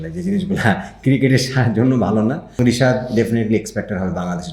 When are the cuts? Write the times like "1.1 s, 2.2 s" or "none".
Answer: 2.6 s